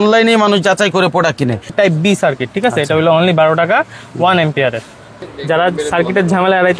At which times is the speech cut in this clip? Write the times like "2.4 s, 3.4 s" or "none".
1.7 s, 5.1 s